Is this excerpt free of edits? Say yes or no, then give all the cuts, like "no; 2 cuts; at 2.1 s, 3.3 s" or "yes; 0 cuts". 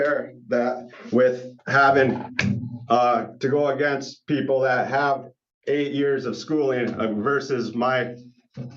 yes; 0 cuts